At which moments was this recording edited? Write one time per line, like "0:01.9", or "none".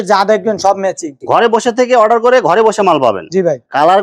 0:01.1

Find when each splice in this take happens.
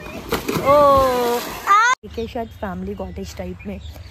0:01.9

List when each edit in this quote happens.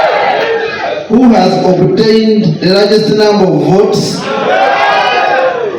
none

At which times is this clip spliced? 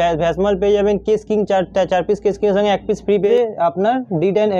0:03.3

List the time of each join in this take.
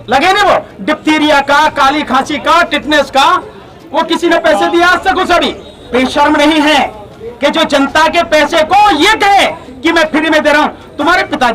0:05.8

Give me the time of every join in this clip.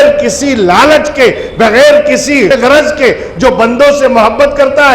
0:02.5

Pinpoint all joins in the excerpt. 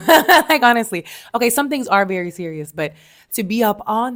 none

